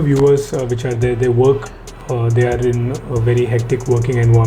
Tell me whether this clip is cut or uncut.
uncut